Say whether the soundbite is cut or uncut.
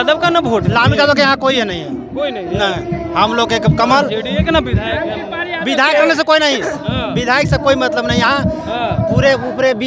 uncut